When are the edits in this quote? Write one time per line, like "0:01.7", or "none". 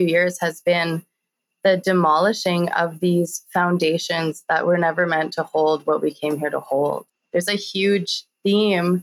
0:07.1